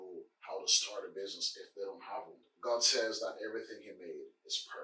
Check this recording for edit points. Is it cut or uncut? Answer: cut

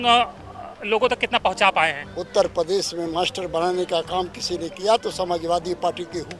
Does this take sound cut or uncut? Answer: cut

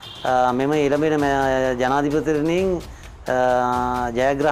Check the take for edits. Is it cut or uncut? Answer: uncut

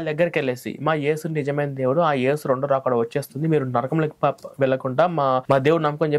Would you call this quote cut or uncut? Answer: uncut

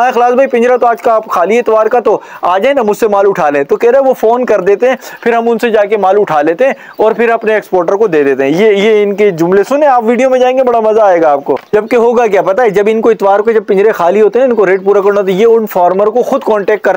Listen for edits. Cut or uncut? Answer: uncut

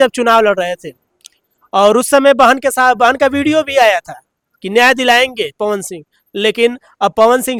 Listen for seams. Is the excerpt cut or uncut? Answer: uncut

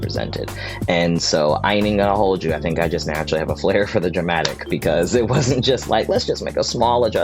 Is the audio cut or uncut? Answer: uncut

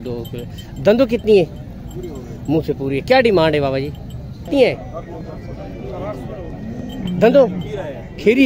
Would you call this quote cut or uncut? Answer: cut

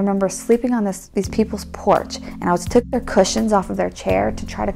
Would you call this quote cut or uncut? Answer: cut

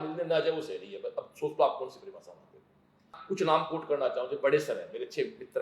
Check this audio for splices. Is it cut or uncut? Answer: cut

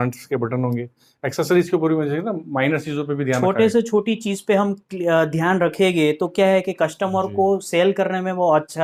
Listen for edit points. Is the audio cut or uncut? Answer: uncut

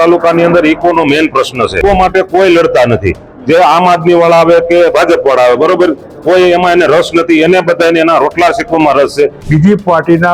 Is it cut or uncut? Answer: cut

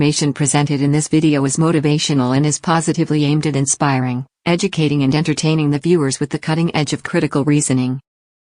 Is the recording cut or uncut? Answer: uncut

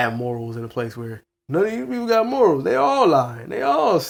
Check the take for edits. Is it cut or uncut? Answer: uncut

